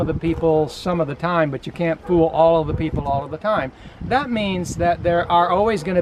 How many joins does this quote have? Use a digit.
0